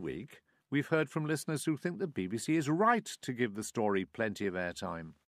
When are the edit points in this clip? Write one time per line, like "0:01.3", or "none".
none